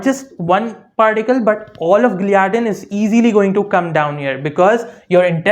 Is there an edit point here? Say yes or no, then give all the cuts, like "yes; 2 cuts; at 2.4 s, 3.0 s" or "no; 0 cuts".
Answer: no; 0 cuts